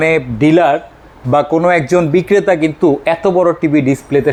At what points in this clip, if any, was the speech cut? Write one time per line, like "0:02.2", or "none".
none

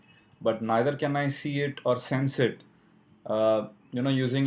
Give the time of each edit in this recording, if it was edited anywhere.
none

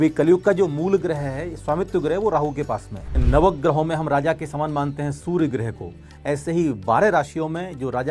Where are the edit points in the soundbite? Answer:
0:03.2

